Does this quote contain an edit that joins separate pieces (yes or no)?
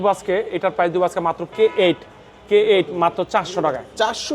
yes